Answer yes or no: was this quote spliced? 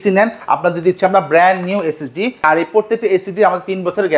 yes